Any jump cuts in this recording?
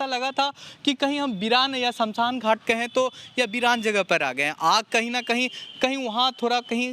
no; 0 cuts

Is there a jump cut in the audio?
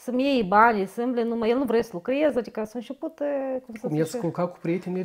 no; 0 cuts

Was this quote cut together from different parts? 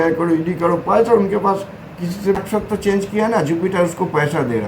yes; 1 cut; at 2.4 s

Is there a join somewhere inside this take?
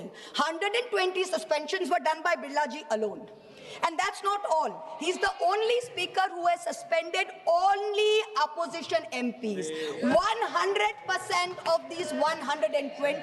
no; 0 cuts

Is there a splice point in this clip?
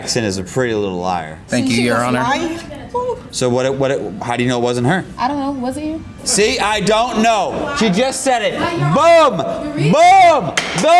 yes; 3 cuts; at 1.4 s, 3.3 s, 6.2 s

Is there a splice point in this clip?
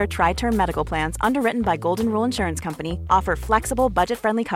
no; 0 cuts

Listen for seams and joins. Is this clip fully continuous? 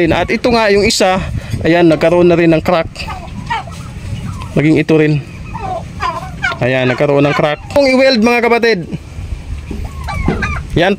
no; 1 cut; at 7.7 s

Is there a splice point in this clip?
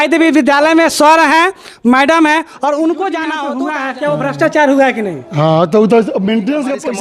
yes; 1 cut; at 3.4 s

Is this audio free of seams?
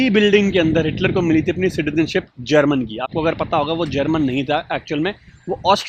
yes; 0 cuts

